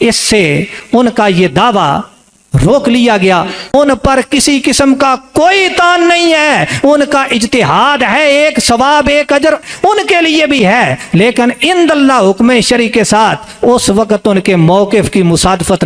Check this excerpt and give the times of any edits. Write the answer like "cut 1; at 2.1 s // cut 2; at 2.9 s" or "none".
none